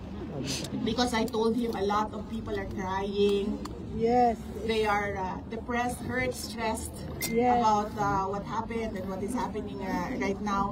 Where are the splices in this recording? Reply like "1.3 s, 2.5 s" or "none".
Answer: none